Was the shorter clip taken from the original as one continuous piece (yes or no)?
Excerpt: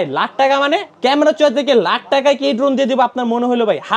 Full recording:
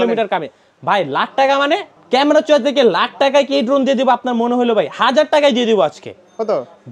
no